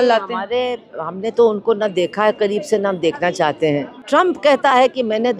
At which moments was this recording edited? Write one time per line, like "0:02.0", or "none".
0:03.9